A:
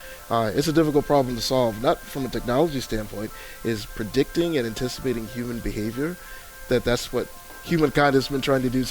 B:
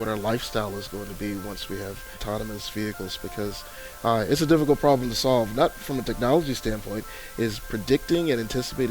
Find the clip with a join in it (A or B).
B